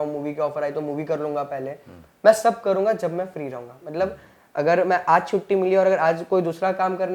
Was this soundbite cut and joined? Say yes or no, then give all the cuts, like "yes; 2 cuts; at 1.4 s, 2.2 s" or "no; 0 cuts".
no; 0 cuts